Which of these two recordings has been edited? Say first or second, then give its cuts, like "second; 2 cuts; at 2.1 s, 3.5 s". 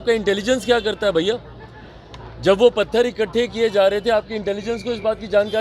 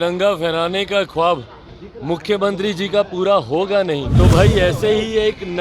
second; 1 cut; at 4.1 s